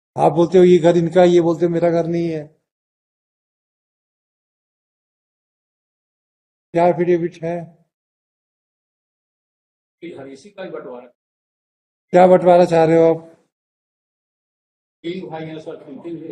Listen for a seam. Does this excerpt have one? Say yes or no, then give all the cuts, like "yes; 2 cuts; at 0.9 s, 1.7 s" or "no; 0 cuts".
no; 0 cuts